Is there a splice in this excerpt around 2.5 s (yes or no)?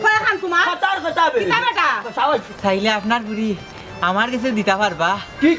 yes